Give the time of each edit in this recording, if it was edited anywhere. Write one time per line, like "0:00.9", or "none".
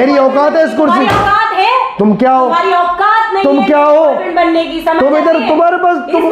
none